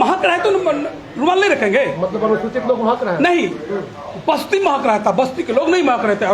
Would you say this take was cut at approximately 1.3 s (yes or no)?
no